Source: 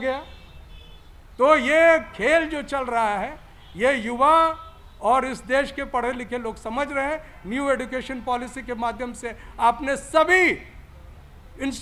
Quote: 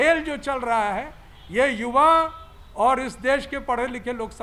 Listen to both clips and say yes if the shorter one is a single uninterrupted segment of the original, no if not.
yes